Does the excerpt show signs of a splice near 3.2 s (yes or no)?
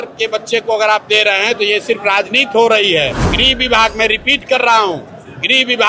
yes